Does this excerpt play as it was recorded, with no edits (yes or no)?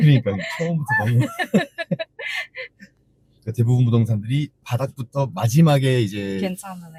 yes